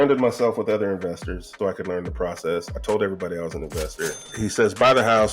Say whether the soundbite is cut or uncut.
cut